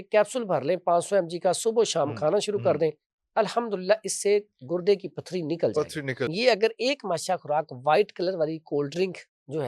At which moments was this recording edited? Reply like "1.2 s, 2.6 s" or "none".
6.3 s